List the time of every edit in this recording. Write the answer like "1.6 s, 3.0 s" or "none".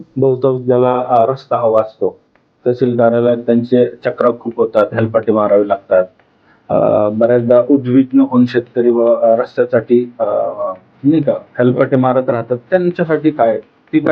none